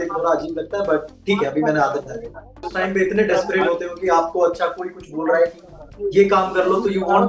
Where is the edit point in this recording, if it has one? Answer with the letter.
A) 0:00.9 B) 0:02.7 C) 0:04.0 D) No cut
B